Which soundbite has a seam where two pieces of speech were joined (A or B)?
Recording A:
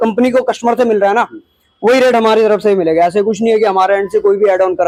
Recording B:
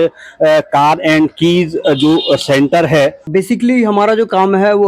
B